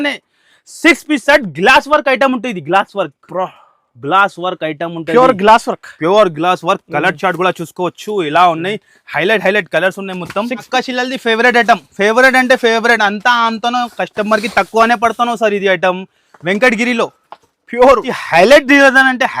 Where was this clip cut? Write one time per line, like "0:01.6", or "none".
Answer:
0:10.6
0:18.1